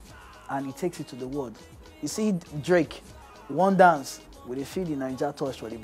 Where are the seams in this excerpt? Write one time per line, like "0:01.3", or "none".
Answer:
none